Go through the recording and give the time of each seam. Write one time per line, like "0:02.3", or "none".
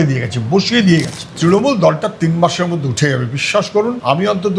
0:01.2